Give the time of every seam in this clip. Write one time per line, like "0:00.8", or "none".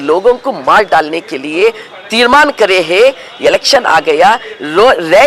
none